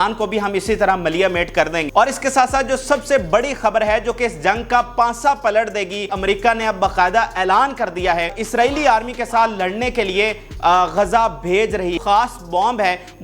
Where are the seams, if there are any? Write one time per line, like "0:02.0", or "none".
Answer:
0:01.8
0:06.1
0:08.4
0:12.0